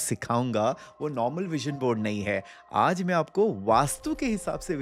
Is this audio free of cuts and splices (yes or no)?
yes